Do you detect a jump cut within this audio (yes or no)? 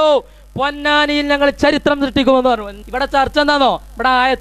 yes